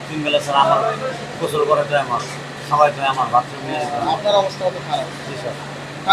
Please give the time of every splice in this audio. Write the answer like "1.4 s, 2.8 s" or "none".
none

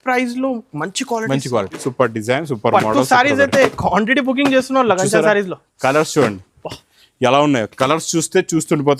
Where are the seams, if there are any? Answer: 1.9 s

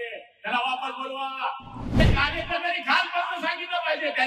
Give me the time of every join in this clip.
2.0 s

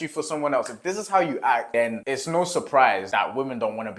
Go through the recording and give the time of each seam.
3.1 s

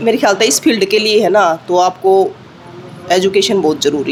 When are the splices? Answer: none

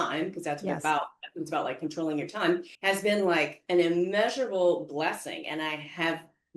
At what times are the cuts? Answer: 2.7 s

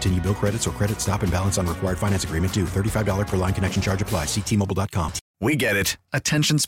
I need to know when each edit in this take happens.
5.2 s

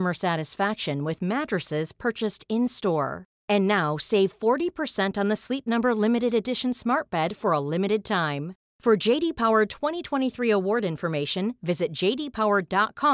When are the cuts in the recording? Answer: none

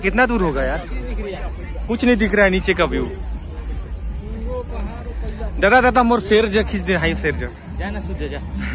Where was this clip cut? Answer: none

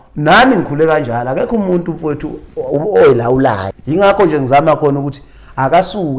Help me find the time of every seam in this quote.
3.7 s

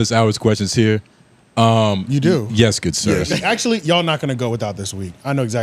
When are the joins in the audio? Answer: 3.4 s

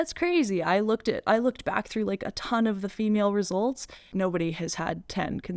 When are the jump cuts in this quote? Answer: 4.0 s

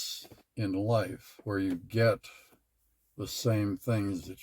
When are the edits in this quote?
none

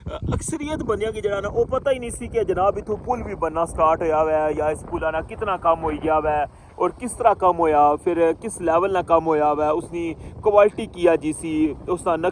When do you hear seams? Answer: none

